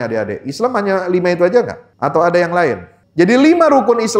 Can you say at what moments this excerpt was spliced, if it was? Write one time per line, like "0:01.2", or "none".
0:01.8
0:02.9